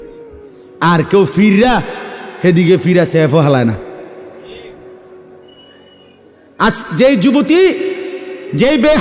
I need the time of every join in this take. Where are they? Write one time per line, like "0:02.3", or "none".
none